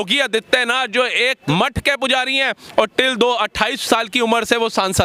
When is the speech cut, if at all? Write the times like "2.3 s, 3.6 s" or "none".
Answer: 1.4 s